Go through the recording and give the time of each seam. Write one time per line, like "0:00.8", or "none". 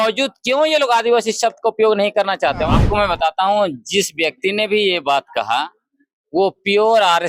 0:02.7